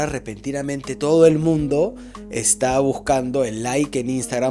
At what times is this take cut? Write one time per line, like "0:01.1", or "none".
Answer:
none